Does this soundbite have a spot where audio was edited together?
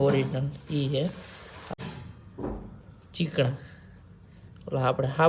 yes; 1 cut; at 1.7 s

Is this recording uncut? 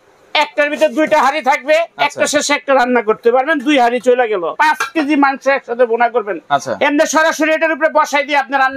no; 1 cut; at 4.5 s

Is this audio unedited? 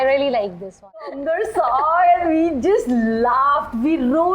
no; 1 cut; at 1.2 s

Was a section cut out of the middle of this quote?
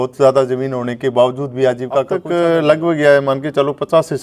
yes; 1 cut; at 2.2 s

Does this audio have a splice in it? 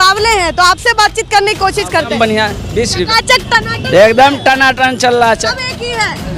yes; 2 cuts; at 2.1 s, 5.5 s

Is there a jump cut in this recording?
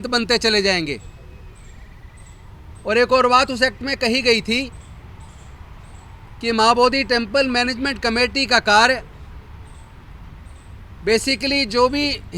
no; 0 cuts

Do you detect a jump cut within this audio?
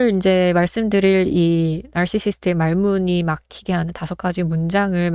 no; 0 cuts

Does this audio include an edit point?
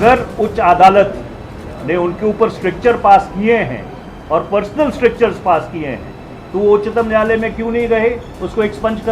no; 0 cuts

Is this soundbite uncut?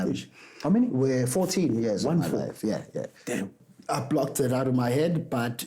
no; 1 cut; at 3.5 s

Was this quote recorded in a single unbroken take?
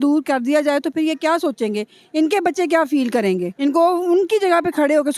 no; 1 cut; at 3.5 s

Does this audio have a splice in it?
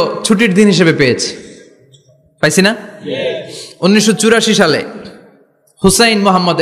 no; 0 cuts

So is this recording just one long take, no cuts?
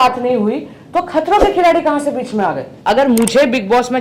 no; 1 cut; at 2.7 s

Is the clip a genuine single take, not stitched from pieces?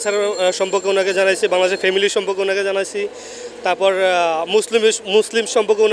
yes; 0 cuts

